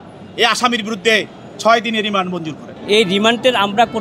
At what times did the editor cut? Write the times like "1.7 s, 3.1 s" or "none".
2.8 s